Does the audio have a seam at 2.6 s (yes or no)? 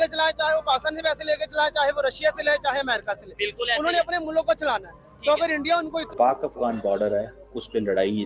no